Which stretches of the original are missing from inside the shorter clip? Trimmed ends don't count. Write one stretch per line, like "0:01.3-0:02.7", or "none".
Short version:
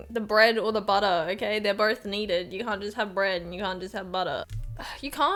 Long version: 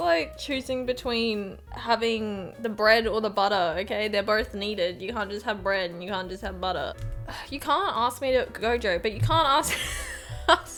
none